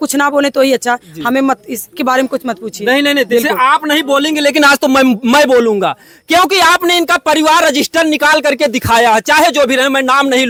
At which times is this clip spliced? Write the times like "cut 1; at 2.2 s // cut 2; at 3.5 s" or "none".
none